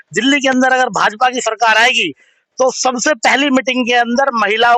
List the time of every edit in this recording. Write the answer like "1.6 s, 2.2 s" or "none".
none